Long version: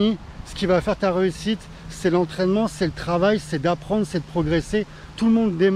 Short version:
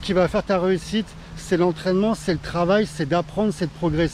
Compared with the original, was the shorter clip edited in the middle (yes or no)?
no